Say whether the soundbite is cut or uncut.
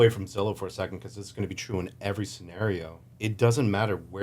cut